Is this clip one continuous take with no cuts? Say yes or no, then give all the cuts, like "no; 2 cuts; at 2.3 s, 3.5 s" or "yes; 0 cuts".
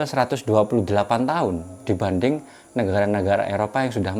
yes; 0 cuts